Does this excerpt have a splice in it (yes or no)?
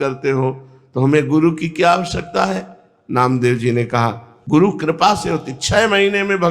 yes